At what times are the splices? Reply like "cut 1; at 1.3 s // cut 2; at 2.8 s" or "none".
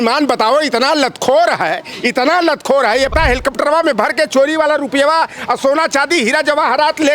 cut 1; at 3.1 s